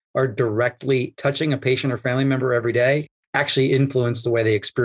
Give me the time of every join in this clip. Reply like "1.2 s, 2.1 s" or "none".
1.1 s